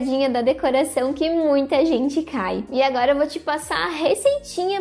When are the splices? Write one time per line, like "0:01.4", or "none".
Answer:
0:02.6

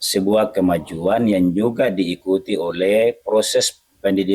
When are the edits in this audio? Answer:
none

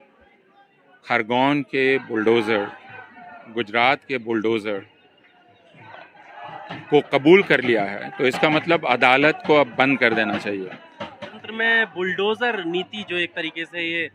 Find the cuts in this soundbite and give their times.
0:11.4

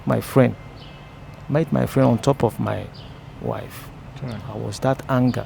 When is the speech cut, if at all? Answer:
none

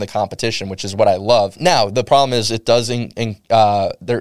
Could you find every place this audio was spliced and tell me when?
none

